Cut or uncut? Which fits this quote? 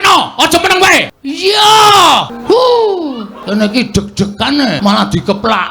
cut